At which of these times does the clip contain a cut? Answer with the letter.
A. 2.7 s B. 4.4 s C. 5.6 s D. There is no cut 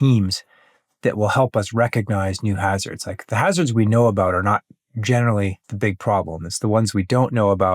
C